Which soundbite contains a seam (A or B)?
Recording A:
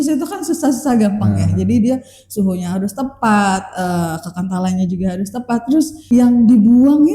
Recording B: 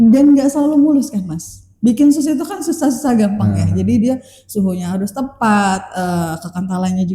A